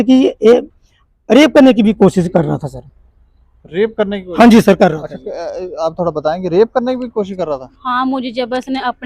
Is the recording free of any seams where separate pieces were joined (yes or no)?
yes